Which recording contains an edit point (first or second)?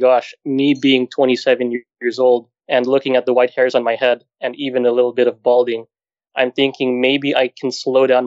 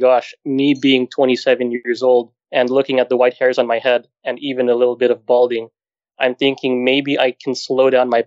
second